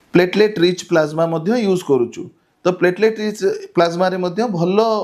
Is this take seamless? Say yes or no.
yes